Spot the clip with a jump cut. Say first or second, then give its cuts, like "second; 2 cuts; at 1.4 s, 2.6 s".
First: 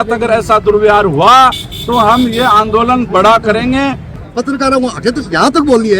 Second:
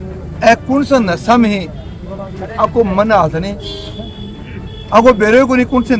first; 1 cut; at 4.2 s